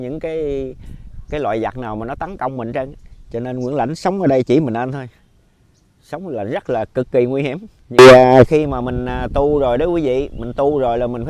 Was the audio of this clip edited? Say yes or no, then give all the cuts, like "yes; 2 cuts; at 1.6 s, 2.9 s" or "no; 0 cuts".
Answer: yes; 1 cut; at 8.0 s